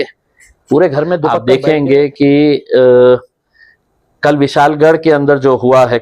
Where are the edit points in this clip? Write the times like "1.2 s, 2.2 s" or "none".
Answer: 1.4 s